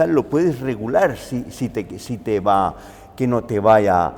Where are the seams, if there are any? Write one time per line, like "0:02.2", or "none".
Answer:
none

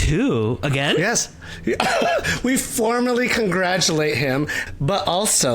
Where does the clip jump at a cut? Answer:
0:04.6

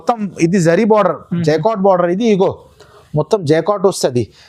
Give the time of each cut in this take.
none

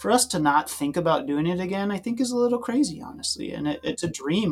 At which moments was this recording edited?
none

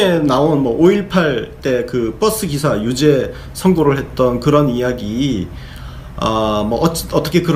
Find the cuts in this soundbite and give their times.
none

